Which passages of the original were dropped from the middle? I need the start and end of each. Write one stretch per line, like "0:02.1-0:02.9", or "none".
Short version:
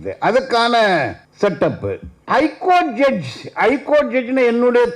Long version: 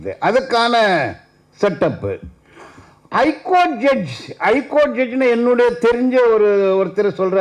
0:01.2-0:01.4
0:02.3-0:02.9

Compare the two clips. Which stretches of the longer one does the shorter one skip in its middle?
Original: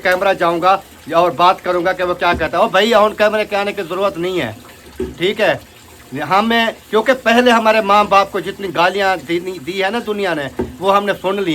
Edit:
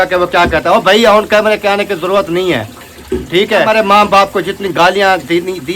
0:05.5-0:07.7

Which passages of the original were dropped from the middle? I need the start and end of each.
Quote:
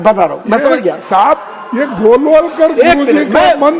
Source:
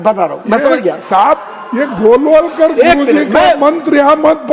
none

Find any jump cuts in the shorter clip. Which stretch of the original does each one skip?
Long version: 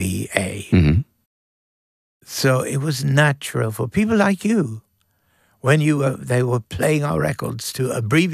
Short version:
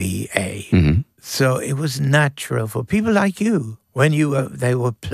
0:01.2-0:02.2
0:04.8-0:05.5

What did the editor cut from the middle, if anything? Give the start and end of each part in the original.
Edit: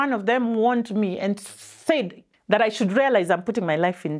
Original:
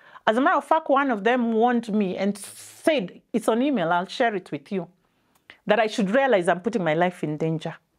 0:03.2-0:05.4

